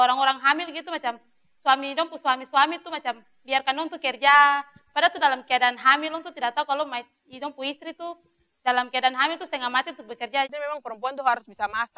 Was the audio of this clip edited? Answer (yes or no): yes